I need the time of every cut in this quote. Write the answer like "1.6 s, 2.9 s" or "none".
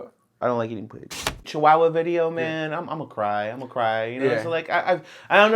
1.4 s